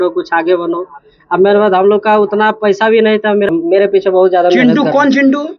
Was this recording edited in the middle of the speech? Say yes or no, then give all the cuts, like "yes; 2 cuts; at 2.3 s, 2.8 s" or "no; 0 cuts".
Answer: yes; 1 cut; at 3.5 s